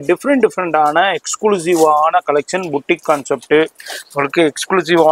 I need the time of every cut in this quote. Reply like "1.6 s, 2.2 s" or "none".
none